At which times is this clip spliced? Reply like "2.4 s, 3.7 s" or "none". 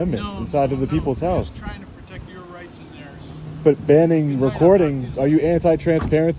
none

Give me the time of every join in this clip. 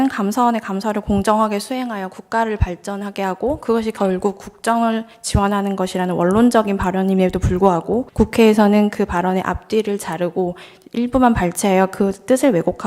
8.1 s

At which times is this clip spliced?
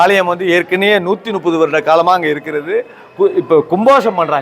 none

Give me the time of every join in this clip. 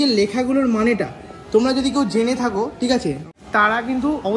3.2 s

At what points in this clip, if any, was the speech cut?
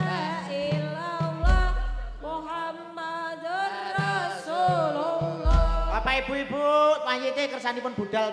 none

